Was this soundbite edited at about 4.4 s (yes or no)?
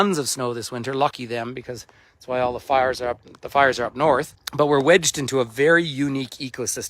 yes